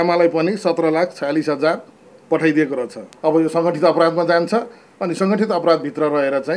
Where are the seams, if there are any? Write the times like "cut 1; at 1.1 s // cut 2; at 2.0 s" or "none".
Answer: cut 1; at 3.0 s